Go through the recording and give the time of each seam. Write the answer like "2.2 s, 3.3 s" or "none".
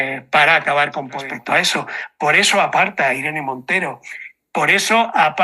1.3 s

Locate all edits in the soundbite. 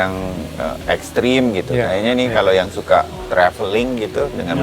none

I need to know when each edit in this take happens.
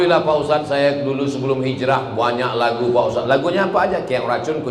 none

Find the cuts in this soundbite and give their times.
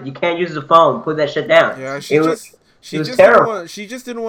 none

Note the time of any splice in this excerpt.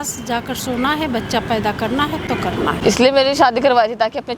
2.8 s

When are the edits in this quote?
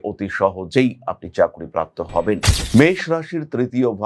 2.5 s

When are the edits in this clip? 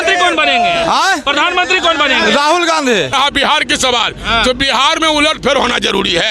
3.1 s

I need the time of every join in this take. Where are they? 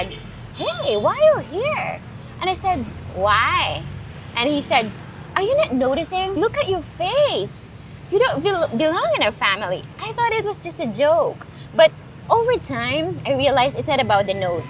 6.4 s, 12.1 s

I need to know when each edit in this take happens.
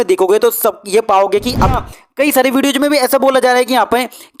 1.8 s

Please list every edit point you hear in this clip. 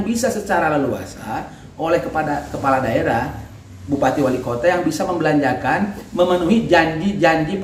none

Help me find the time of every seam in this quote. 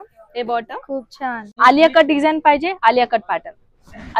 1.5 s

